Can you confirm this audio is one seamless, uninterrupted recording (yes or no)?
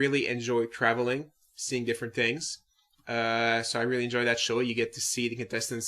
no